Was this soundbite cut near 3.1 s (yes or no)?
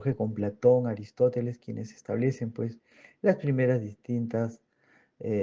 no